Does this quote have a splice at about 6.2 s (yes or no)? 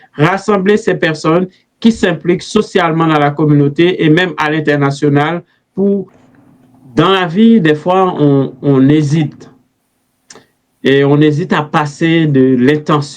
yes